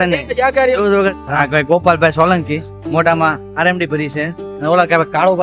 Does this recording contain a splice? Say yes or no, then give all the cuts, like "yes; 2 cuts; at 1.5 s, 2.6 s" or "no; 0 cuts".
yes; 2 cuts; at 1.2 s, 4.4 s